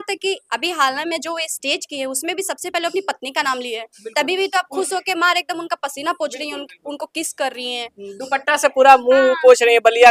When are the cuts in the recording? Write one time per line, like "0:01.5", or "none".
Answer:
none